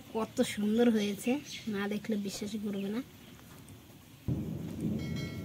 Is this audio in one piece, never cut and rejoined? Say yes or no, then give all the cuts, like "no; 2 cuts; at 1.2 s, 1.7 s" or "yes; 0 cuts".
no; 1 cut; at 4.3 s